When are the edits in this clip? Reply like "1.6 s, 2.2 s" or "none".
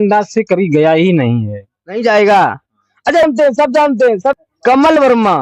4.5 s